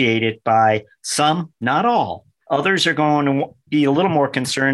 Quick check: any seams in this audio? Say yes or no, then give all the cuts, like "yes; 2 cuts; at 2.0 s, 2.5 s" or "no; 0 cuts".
no; 0 cuts